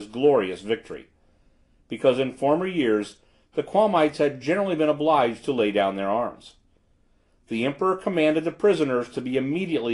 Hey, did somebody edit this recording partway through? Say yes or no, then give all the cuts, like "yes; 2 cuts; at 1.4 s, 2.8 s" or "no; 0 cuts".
no; 0 cuts